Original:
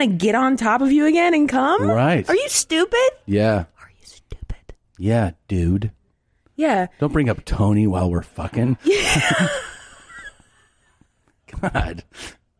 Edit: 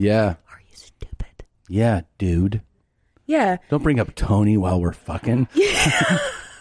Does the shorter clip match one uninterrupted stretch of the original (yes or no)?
yes